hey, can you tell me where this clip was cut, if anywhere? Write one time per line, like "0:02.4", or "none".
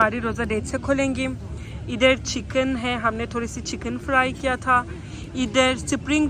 none